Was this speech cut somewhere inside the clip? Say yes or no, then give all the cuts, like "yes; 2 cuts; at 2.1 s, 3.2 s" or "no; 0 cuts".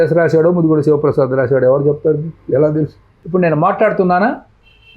yes; 1 cut; at 3.2 s